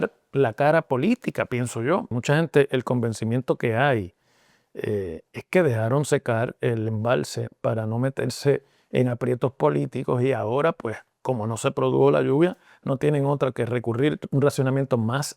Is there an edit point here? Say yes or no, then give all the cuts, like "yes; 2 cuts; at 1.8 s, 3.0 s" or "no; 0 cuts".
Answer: yes; 2 cuts; at 2.2 s, 14.2 s